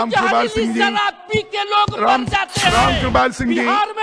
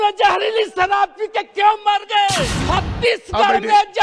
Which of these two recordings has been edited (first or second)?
second